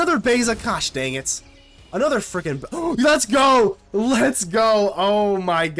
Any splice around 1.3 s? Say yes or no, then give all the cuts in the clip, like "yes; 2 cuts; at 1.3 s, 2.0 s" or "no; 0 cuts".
no; 0 cuts